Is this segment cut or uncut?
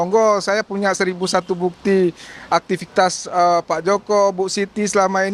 uncut